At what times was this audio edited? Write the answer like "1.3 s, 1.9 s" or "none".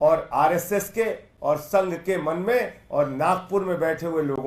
none